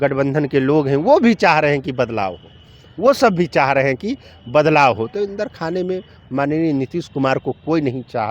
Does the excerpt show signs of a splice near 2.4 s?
no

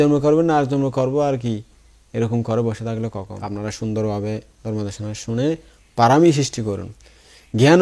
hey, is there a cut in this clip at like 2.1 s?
no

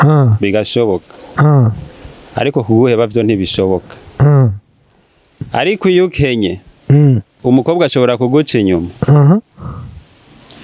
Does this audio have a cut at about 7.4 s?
yes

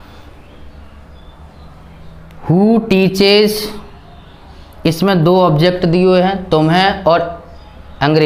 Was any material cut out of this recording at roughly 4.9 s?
no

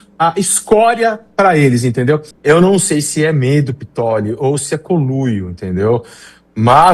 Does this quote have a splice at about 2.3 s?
yes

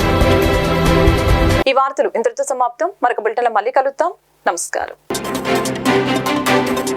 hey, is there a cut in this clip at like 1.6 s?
no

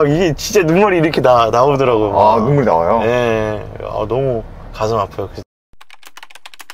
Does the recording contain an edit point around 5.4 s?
yes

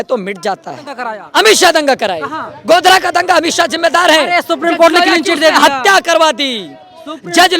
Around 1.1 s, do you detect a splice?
yes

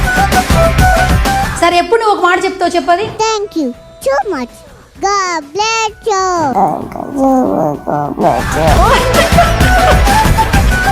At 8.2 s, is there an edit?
no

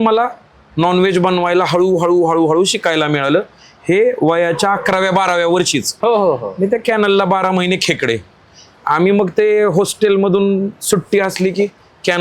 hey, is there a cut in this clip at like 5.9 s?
yes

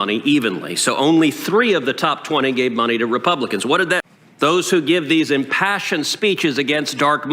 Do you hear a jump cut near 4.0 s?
yes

